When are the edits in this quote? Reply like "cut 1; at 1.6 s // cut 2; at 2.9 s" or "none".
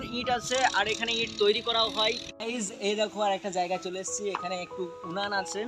cut 1; at 2.3 s